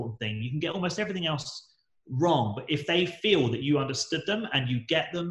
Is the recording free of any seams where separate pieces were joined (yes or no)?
yes